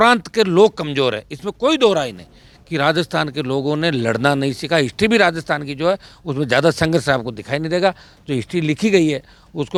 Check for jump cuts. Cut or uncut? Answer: uncut